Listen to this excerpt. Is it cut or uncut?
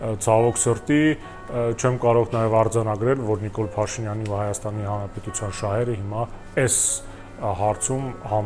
uncut